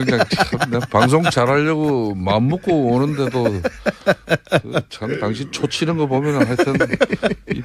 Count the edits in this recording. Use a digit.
1